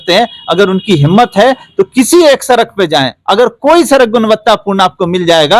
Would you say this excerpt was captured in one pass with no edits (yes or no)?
yes